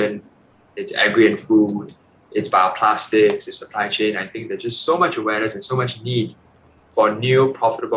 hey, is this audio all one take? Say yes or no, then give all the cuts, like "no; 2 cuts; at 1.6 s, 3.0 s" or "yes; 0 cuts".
yes; 0 cuts